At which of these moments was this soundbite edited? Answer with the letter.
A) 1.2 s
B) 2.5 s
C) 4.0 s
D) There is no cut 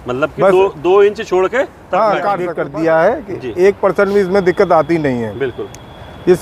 B